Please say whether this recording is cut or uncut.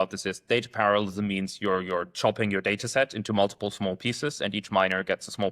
uncut